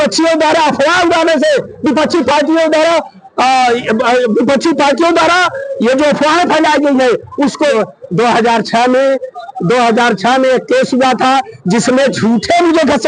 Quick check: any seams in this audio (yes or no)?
yes